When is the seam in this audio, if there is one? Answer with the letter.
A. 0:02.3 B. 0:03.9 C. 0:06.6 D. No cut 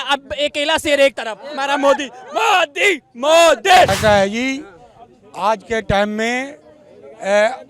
B